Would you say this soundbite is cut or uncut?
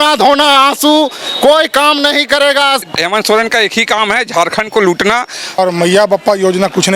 cut